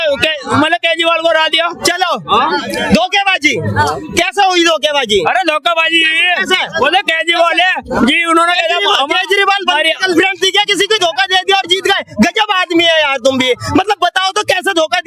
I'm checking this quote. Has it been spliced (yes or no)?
no